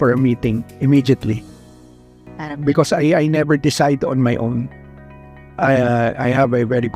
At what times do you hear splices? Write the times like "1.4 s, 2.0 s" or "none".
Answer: none